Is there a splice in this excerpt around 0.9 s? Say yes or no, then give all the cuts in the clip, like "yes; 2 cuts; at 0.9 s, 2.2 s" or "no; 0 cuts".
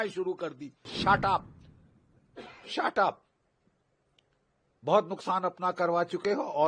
yes; 1 cut; at 0.9 s